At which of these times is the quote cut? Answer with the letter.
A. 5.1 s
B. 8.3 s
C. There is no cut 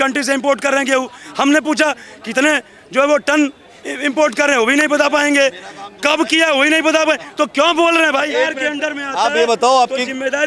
B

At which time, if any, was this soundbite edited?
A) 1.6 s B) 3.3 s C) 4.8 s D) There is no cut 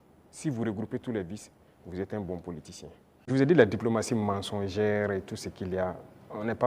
B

